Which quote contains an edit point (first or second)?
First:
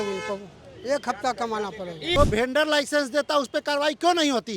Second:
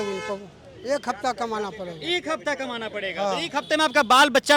first